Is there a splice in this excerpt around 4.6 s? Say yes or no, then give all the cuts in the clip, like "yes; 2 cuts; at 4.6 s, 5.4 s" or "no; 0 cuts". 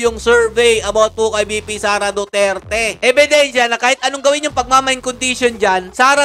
no; 1 cut; at 3.0 s